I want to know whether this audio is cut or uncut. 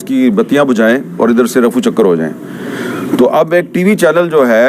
uncut